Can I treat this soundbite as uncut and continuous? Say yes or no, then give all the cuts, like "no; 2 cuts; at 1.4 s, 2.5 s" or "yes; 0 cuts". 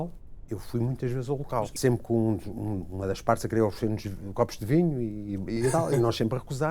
no; 1 cut; at 1.6 s